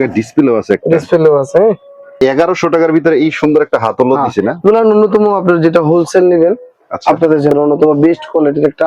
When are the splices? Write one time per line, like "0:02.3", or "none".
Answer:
0:02.1
0:07.5